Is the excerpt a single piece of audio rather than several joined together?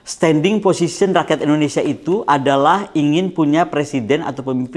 yes; 0 cuts

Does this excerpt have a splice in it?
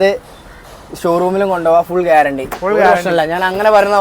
no; 0 cuts

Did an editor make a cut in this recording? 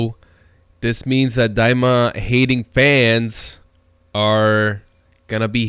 no; 0 cuts

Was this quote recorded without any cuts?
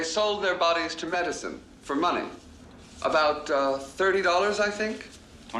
yes; 0 cuts

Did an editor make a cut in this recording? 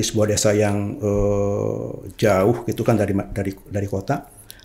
no; 0 cuts

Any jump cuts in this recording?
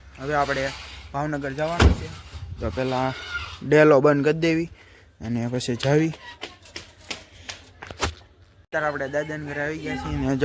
no; 0 cuts

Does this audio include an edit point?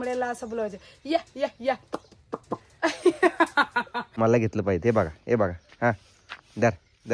yes; 1 cut; at 4.0 s

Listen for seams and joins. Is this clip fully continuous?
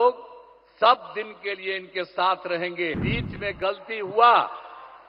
no; 1 cut; at 3.0 s

